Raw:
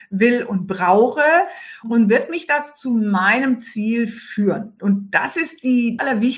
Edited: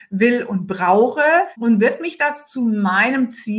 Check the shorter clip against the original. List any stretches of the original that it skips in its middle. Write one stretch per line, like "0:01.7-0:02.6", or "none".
0:01.5-0:01.8